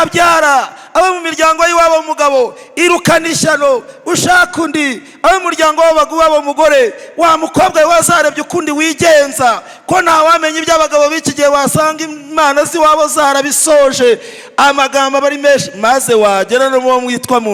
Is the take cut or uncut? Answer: uncut